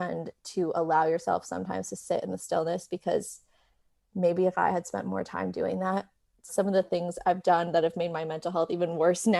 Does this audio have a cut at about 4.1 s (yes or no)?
no